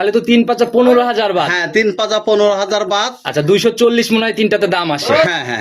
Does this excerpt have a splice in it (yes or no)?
no